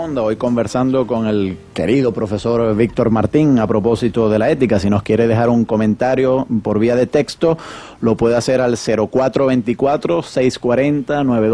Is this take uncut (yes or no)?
no